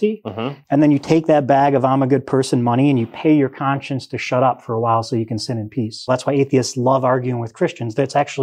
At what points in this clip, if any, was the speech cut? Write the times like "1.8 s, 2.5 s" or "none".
6.0 s